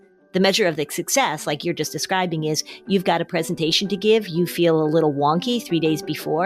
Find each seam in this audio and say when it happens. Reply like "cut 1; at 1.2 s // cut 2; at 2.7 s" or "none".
none